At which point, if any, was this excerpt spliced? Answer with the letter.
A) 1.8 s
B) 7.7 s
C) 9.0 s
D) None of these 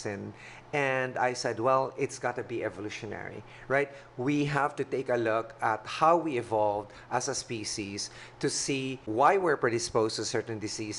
C